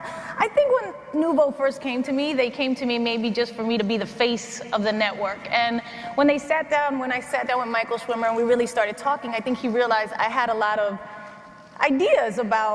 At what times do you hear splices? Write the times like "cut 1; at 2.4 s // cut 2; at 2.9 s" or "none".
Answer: cut 1; at 4.1 s